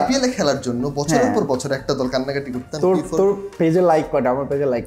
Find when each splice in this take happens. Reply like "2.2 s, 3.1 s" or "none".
2.6 s